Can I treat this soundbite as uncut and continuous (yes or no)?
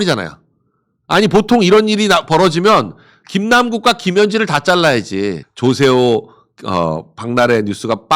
no